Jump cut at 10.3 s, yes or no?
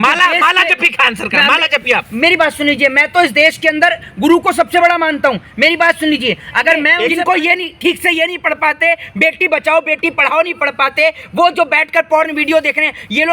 no